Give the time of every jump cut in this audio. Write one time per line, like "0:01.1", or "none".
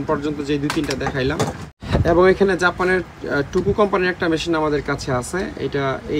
0:01.7